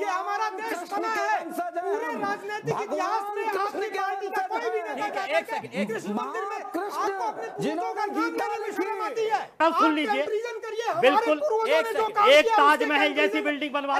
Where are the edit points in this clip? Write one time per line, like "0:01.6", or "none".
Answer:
0:09.6